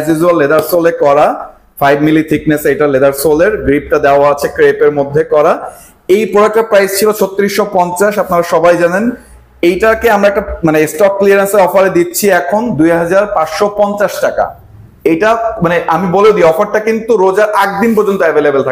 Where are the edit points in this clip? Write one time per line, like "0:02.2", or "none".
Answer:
none

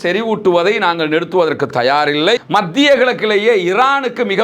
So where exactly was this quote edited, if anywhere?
0:02.4

